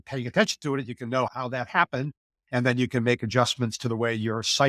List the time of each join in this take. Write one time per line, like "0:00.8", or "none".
0:01.3